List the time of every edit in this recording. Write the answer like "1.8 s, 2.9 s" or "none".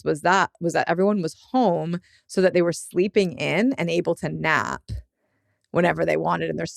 none